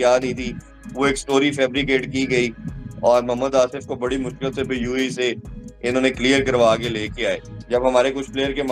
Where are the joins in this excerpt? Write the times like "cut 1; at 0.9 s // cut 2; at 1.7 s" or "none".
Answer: cut 1; at 7.5 s